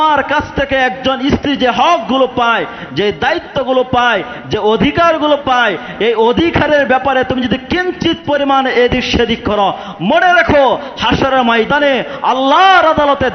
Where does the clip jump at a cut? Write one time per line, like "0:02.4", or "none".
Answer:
none